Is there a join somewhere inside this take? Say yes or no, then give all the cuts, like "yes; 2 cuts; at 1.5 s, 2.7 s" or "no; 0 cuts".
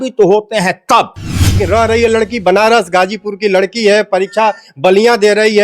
yes; 1 cut; at 1.6 s